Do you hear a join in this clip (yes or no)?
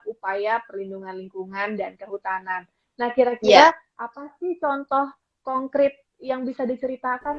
no